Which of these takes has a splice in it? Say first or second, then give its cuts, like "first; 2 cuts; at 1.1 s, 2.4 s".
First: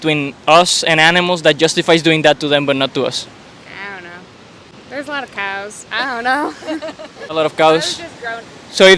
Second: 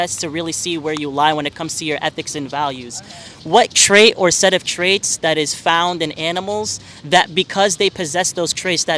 first; 2 cuts; at 4.7 s, 7.2 s